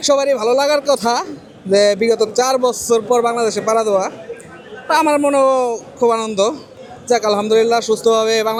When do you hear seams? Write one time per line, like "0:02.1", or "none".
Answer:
none